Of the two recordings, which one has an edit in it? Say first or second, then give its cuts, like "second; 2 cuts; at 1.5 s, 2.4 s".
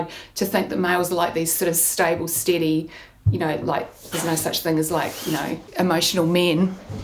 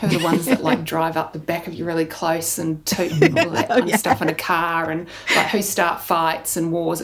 first; 1 cut; at 5.7 s